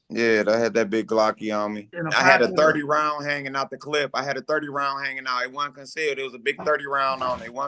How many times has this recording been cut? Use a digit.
1